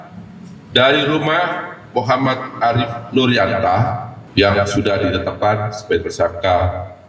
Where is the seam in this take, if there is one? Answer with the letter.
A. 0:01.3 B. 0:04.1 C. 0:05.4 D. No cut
B